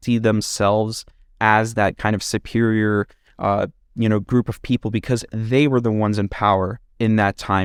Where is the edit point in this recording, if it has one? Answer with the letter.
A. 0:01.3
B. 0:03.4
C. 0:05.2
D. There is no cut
D